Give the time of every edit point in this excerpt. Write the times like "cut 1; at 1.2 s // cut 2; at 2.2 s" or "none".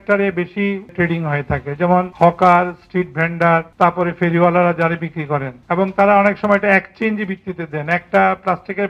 cut 1; at 0.9 s // cut 2; at 2.1 s // cut 3; at 3.7 s // cut 4; at 5.6 s